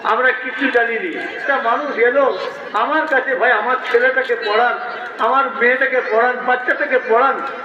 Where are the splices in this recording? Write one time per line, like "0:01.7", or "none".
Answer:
0:01.4